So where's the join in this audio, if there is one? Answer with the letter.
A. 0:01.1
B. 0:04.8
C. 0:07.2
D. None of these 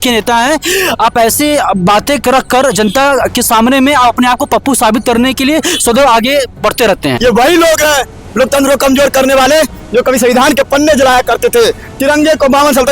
C